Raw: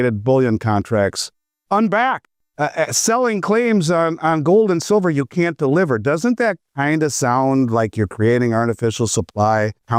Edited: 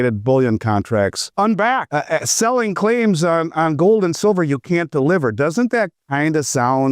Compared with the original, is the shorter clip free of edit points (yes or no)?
no